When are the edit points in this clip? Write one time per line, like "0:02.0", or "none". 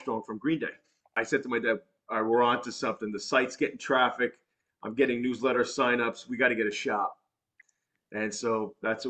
0:01.2